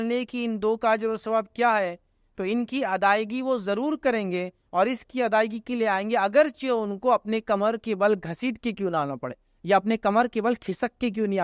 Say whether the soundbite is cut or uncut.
uncut